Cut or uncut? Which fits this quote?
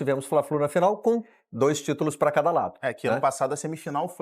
uncut